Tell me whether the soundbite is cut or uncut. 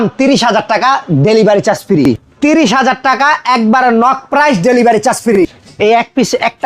cut